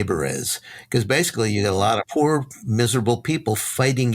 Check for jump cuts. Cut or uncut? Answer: cut